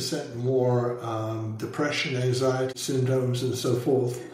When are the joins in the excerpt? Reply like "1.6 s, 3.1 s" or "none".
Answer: 2.7 s